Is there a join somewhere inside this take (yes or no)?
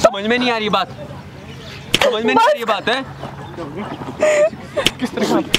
no